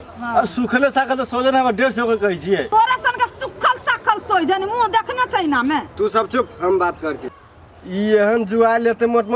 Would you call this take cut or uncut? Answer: uncut